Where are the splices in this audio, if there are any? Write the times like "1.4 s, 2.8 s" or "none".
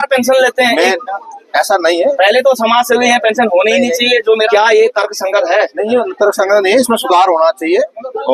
4.5 s